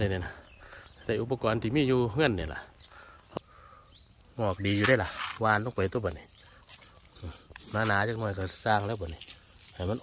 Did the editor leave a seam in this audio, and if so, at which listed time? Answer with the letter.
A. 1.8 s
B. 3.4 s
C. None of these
B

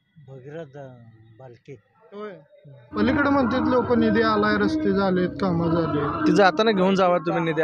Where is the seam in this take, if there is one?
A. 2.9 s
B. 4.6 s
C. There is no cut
A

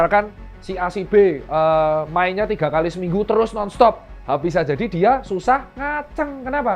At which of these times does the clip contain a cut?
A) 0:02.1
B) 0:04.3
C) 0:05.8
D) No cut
D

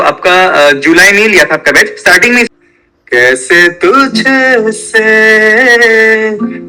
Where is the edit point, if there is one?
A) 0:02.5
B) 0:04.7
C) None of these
A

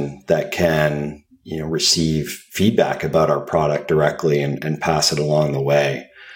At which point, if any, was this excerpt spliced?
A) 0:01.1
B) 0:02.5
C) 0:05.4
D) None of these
D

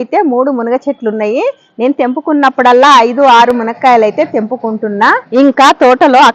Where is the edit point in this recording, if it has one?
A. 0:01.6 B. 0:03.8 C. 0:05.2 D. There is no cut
C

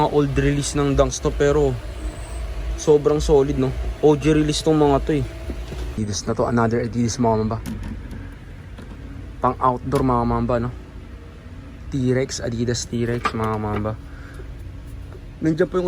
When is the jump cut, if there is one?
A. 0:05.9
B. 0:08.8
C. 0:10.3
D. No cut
A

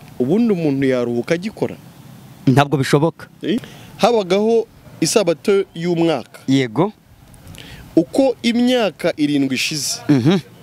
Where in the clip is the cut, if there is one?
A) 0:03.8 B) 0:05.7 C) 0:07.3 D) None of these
A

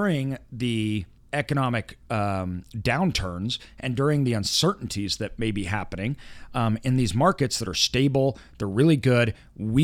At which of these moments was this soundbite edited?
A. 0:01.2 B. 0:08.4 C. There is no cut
A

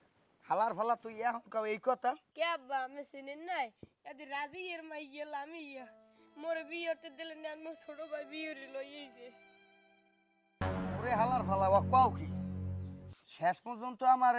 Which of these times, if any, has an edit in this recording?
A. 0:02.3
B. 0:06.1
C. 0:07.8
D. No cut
A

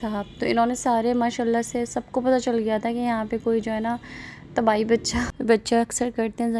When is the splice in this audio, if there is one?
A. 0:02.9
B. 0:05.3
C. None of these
B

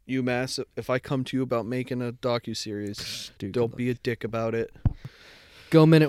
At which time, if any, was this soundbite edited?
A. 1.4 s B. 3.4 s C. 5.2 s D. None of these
C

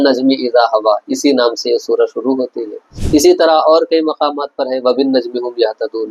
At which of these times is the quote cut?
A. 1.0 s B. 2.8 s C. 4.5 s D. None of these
D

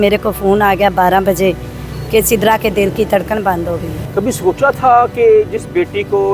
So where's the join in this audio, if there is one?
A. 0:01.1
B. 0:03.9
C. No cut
B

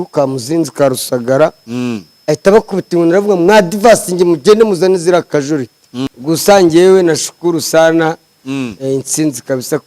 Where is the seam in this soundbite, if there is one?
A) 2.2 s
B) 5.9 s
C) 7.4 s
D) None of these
B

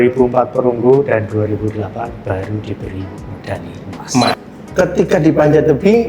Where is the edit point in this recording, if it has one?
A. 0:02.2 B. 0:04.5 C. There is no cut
B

